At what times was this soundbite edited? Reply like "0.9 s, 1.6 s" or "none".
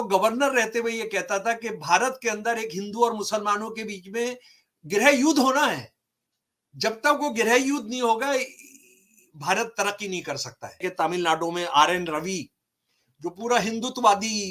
10.9 s